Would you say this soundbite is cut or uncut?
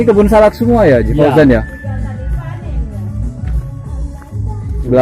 uncut